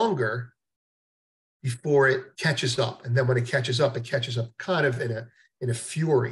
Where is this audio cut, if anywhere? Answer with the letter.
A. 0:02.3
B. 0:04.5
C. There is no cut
A